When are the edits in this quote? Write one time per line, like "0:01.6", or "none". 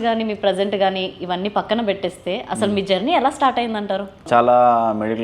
0:04.2

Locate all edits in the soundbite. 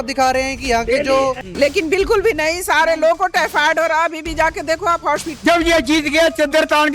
0:01.4
0:05.3

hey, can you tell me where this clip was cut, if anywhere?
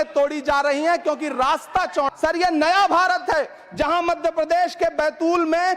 0:02.1

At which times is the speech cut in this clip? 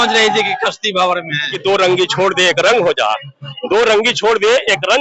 0:01.5

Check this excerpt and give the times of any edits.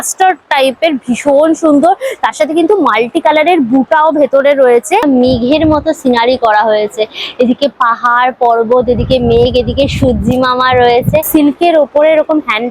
0:05.0
0:11.3

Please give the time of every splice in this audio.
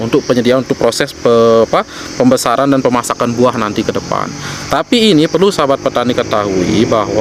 none

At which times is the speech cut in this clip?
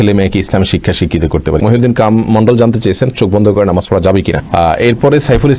0:01.6
0:04.4

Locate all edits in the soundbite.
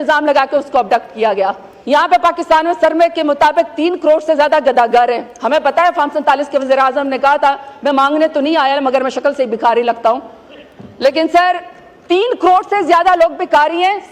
0:01.7

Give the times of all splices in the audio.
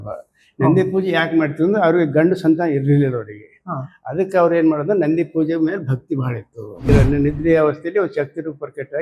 0:06.9

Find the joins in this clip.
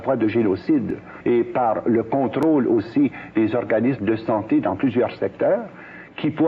0:01.1

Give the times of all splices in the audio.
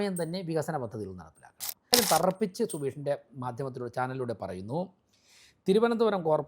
0:01.9

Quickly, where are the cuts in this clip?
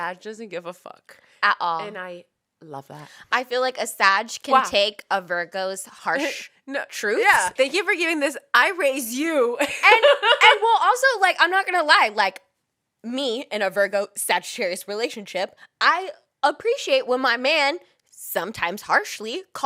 0:05.9
0:07.5

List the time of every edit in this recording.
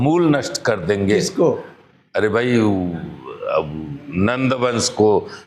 none

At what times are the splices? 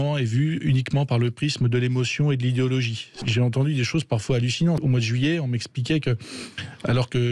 0:03.1
0:04.8

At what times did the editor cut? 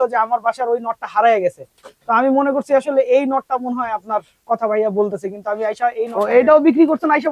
0:06.1

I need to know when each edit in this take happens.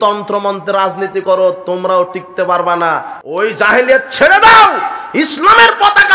0:03.2

